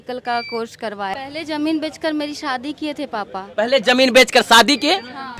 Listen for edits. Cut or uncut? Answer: cut